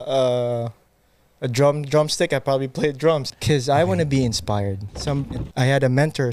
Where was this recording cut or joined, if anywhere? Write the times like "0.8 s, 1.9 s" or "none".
3.3 s, 5.0 s